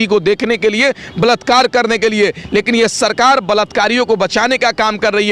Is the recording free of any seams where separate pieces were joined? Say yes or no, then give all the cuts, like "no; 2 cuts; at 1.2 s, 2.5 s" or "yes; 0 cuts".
yes; 0 cuts